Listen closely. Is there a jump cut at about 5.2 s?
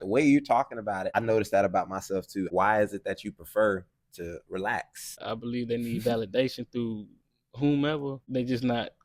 yes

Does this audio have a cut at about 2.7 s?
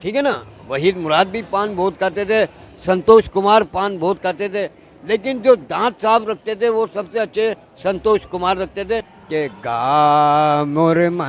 no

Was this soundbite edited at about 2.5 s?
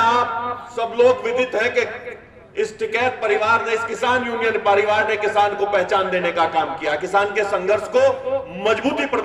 no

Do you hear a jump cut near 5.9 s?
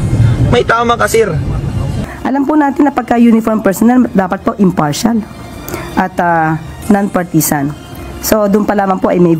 no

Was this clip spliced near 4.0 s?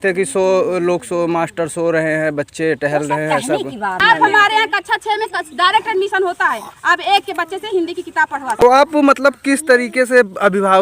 yes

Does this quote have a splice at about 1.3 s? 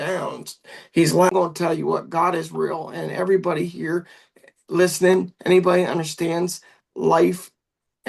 yes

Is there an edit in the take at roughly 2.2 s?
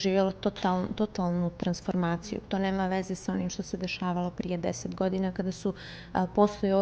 yes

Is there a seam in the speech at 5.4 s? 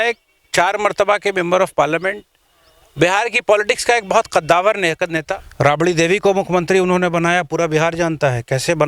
yes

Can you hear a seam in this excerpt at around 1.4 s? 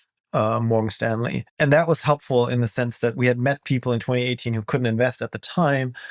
yes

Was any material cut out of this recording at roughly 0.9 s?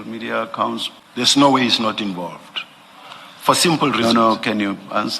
yes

